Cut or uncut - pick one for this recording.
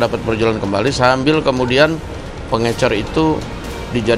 uncut